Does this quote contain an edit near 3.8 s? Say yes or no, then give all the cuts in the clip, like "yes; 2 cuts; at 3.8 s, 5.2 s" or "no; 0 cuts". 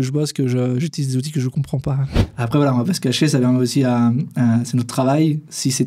no; 1 cut; at 2.1 s